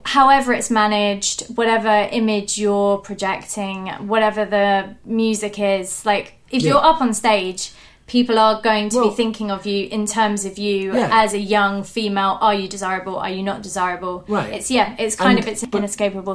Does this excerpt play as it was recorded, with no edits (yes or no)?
no